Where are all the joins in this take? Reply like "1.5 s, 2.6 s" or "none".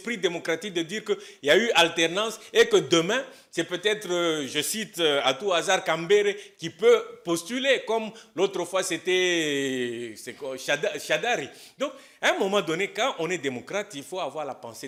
none

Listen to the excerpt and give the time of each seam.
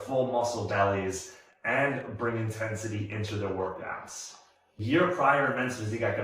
4.8 s

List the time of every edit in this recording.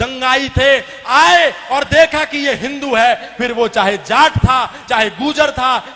none

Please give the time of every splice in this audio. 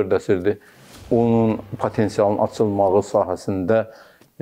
none

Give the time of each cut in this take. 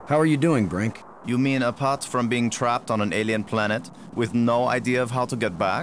1.1 s

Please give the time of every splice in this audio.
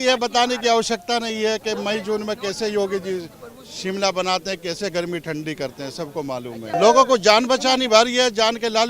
6.8 s

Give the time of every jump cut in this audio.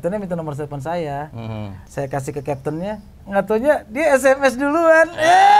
1.8 s

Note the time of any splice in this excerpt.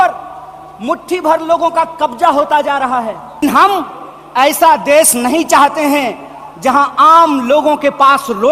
3.4 s

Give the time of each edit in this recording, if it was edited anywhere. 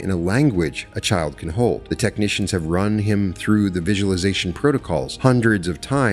1.8 s, 5.1 s

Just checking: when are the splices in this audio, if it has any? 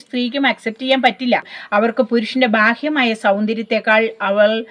1.5 s

